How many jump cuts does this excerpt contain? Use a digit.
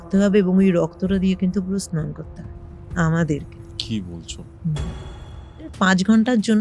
1